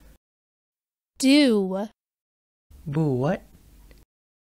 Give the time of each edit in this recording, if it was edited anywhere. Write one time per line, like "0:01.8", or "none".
none